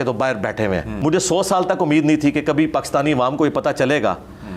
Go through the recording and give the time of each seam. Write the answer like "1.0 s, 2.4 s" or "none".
0.9 s